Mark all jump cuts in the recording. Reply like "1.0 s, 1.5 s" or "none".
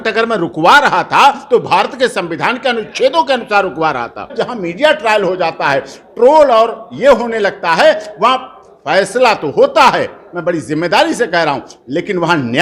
4.3 s

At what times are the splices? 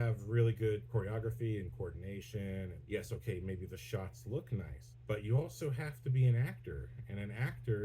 0.9 s, 2.8 s, 4.8 s

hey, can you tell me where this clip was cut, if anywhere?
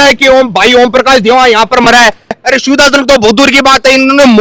2.4 s

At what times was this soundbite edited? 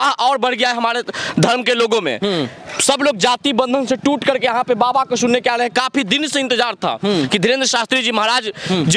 none

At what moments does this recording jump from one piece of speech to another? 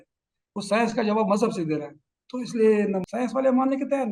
3.0 s

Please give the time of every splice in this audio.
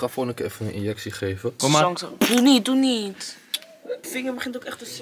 1.6 s, 4.0 s

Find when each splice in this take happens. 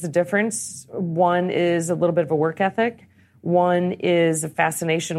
none

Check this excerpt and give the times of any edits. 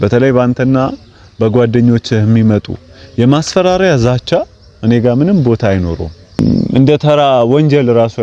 6.4 s

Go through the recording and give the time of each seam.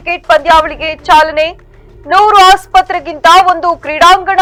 none

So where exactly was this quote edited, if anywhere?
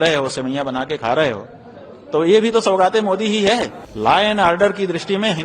3.8 s

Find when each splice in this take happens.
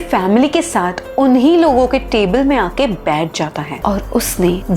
3.7 s

